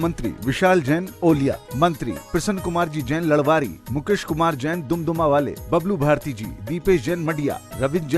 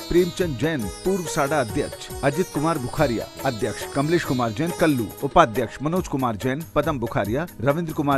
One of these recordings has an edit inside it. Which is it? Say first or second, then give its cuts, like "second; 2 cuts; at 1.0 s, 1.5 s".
second; 2 cuts; at 3.8 s, 5.1 s